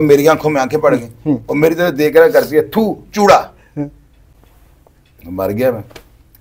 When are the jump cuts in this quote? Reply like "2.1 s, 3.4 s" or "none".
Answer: none